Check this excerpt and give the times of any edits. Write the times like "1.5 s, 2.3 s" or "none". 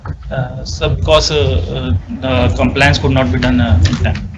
none

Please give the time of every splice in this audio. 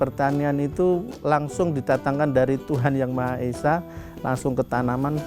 1.1 s

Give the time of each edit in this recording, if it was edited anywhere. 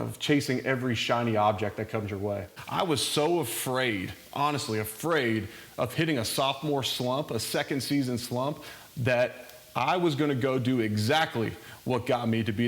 2.6 s

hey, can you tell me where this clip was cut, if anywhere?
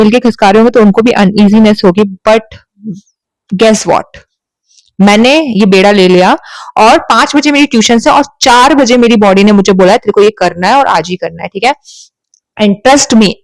none

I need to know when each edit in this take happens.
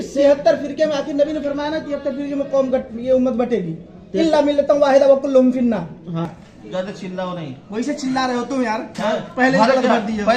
6.2 s

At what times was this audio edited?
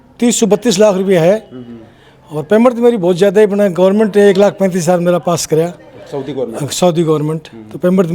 none

